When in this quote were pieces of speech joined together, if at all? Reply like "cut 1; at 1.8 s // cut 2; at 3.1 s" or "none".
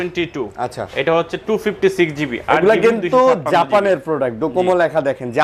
none